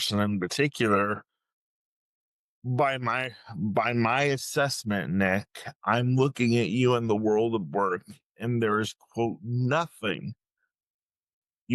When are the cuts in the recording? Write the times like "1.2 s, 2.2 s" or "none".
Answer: none

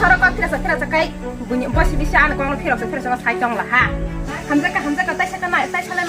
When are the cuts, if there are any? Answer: 4.3 s

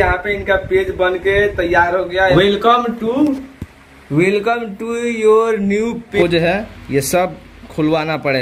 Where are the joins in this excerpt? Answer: 2.3 s, 6.1 s

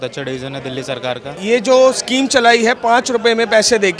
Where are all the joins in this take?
1.3 s

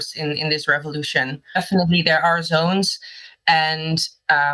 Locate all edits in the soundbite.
1.6 s

